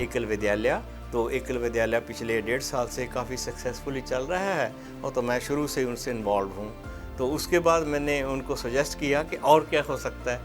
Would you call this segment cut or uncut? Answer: cut